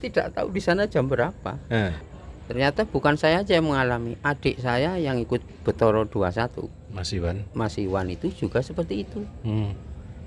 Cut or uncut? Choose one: cut